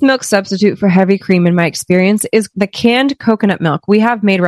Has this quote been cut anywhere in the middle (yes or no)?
yes